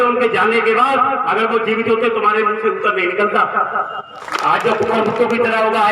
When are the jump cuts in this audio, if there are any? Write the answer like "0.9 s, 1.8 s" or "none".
4.2 s